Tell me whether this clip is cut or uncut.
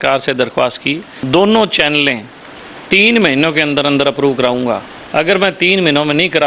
cut